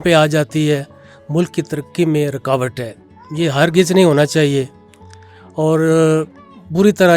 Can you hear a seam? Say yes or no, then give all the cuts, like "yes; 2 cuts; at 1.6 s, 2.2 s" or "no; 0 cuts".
no; 0 cuts